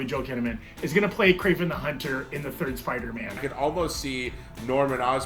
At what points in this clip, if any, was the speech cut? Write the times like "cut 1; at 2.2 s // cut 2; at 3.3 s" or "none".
cut 1; at 3.4 s